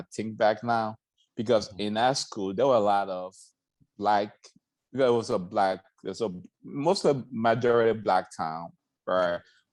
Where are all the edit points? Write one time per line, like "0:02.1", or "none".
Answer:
none